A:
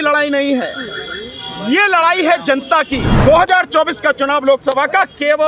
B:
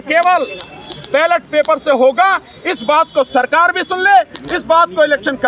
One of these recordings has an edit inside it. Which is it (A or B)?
A